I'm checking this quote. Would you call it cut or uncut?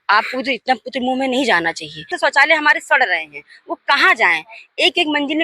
cut